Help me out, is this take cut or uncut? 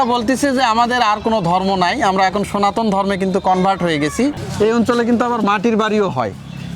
cut